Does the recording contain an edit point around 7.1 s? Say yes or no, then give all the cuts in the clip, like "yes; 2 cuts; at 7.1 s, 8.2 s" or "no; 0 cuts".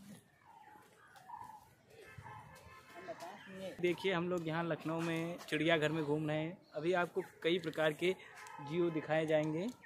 no; 1 cut; at 3.8 s